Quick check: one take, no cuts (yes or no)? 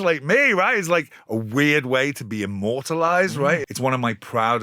no